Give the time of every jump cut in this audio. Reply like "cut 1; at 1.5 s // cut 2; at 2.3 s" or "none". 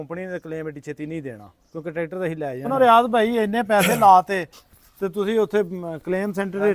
cut 1; at 2.7 s